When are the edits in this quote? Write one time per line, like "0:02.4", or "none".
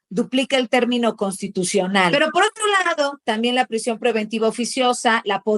0:02.1